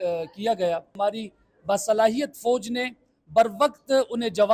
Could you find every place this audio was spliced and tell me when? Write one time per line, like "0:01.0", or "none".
0:00.9